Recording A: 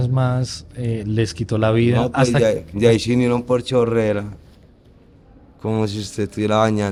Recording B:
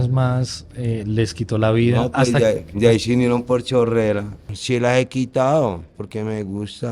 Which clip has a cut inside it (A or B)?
B